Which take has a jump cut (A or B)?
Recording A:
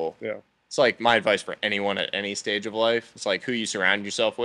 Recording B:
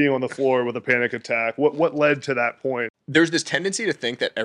B